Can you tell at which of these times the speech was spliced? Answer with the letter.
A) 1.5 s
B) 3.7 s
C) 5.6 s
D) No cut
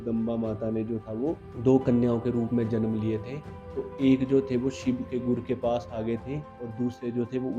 A